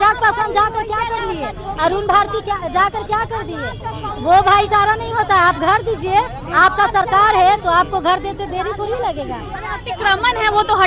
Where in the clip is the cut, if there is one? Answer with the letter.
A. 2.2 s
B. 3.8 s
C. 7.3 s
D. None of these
D